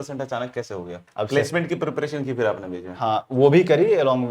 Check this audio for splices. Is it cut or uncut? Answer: cut